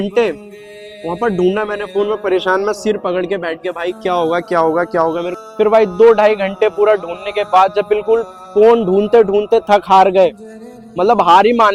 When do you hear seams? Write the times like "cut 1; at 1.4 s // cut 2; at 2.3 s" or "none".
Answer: none